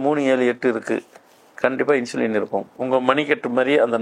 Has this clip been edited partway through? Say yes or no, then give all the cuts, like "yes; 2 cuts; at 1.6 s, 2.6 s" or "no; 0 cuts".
yes; 1 cut; at 2.7 s